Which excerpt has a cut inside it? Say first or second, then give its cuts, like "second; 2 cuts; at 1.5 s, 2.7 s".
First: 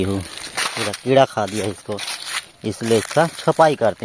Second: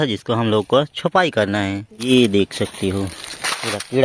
second; 1 cut; at 1.9 s